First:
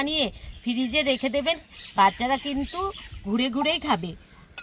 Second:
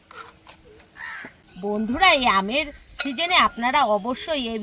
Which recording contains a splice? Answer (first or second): second